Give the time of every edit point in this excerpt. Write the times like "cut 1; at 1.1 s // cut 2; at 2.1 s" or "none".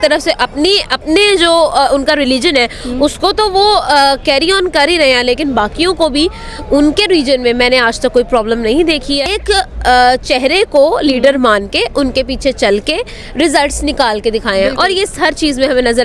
cut 1; at 9.3 s